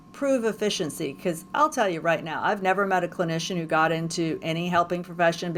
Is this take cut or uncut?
uncut